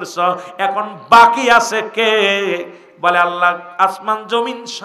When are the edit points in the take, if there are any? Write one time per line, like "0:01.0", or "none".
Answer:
none